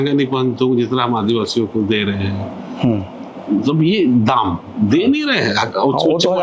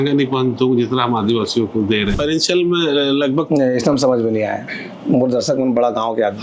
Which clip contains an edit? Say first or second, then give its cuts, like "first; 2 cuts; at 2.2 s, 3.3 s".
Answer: second; 1 cut; at 2.2 s